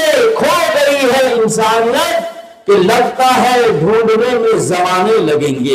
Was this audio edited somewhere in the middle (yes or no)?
yes